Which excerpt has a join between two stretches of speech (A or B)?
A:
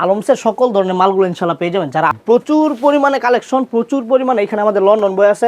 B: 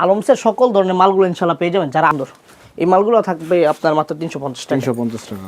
B